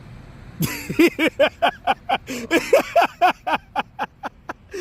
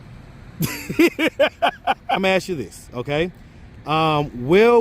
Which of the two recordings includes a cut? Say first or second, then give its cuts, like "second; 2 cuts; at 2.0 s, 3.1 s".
second; 1 cut; at 2.2 s